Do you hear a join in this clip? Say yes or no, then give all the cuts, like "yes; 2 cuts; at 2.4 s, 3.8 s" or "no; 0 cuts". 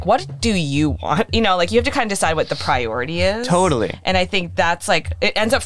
yes; 1 cut; at 1.3 s